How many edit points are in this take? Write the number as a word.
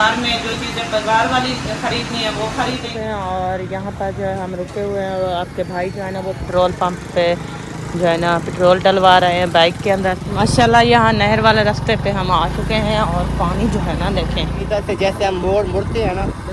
three